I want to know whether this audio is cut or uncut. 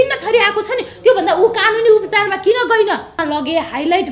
cut